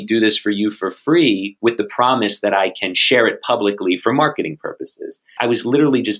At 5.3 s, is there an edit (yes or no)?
yes